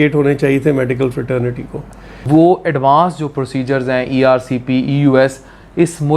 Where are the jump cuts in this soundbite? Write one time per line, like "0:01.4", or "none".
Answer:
0:02.1